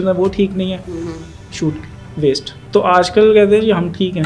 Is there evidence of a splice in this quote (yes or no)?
yes